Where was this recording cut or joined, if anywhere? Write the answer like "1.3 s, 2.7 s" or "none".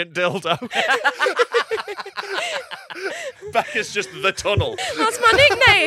4.7 s